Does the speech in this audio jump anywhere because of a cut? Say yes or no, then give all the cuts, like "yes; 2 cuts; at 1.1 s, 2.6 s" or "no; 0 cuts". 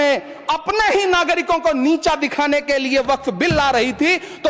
no; 0 cuts